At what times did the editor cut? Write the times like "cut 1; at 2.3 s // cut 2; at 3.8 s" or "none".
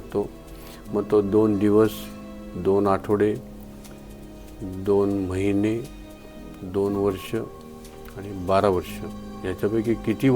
none

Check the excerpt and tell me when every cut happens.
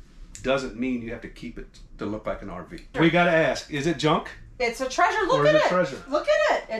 cut 1; at 2.9 s

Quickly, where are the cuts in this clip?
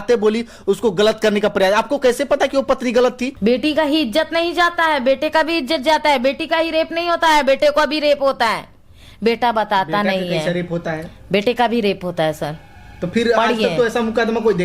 cut 1; at 3.3 s

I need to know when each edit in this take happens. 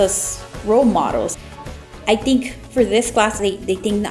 cut 1; at 1.3 s // cut 2; at 3.4 s

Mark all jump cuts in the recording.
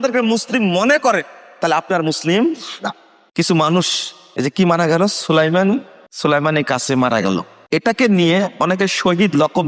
none

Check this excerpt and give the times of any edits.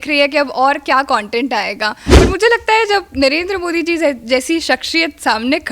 cut 1; at 2.1 s

